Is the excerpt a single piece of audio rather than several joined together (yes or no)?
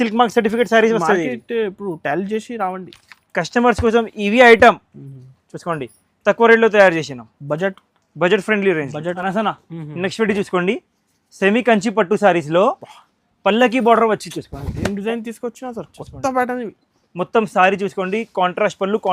no